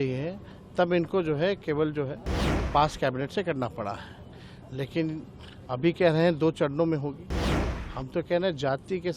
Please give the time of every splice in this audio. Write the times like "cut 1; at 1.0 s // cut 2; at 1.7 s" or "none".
none